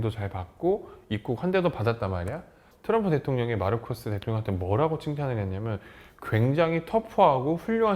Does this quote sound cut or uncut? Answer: cut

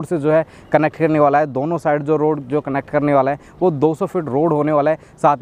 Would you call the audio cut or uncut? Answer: uncut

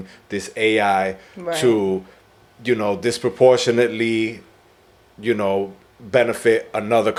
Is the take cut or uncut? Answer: uncut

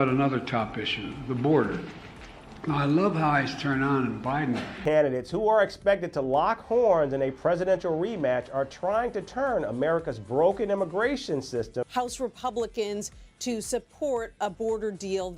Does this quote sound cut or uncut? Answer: cut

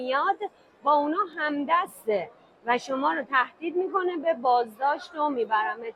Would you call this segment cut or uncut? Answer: uncut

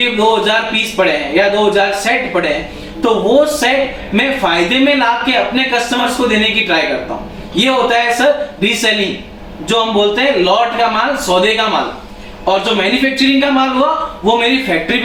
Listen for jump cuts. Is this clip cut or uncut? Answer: uncut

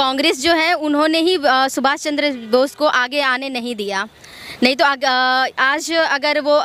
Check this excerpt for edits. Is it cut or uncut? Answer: uncut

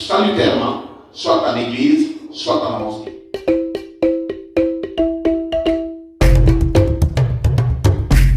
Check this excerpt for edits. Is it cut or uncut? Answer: cut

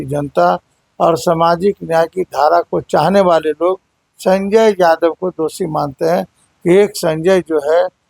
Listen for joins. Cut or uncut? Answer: uncut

